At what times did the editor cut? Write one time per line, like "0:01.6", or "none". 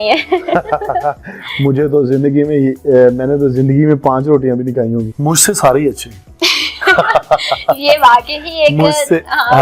0:05.1